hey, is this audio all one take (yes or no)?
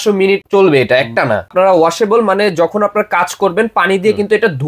no